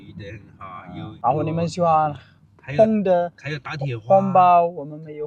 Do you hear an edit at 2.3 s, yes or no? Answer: no